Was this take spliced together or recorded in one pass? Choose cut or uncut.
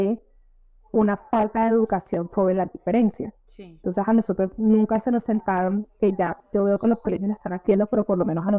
uncut